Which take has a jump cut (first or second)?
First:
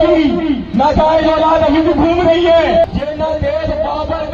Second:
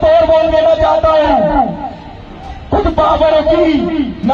first